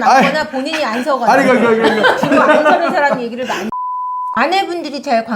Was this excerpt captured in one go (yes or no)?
no